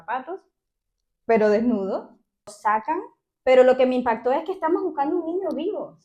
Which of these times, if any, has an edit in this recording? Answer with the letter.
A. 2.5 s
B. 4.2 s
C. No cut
A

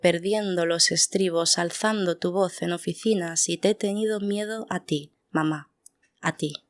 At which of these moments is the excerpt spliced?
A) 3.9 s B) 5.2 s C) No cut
C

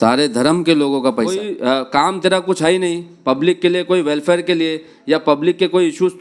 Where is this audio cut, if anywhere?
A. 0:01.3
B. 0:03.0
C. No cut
A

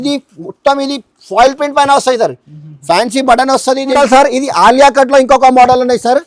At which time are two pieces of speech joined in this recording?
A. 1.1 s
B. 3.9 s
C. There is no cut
B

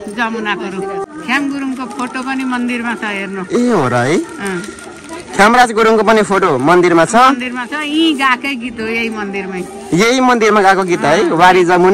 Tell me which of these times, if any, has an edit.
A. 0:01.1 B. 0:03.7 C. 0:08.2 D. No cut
A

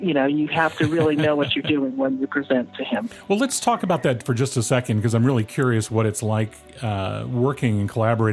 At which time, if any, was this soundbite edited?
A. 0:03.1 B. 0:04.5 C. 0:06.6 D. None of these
A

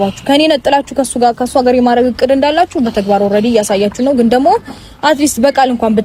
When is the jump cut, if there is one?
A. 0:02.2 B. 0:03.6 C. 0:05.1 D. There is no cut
D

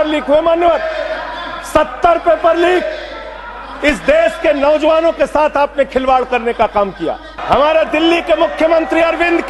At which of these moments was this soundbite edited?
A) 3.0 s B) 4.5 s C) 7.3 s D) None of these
C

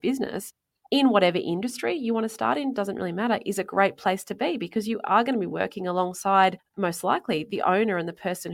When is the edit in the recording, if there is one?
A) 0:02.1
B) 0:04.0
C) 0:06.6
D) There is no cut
D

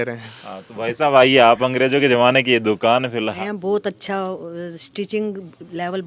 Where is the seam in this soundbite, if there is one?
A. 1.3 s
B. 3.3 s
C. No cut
B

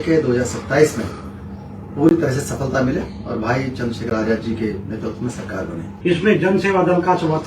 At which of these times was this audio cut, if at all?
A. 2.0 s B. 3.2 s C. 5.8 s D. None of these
C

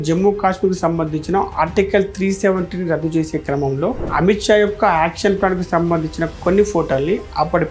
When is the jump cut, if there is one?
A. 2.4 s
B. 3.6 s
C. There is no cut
C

